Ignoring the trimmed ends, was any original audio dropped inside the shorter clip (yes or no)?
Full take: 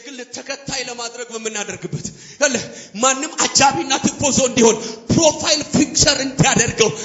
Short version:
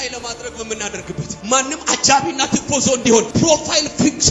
yes